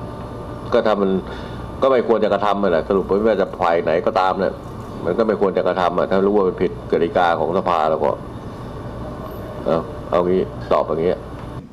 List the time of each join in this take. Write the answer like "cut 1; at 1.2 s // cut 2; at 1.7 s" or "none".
none